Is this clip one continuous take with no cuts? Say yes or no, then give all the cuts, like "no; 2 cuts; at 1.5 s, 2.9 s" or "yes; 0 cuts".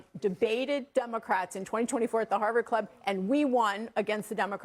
yes; 0 cuts